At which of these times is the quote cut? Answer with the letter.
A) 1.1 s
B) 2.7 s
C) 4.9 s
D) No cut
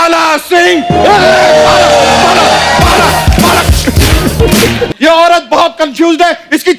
C